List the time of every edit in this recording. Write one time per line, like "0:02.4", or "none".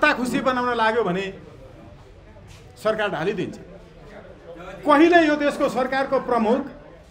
none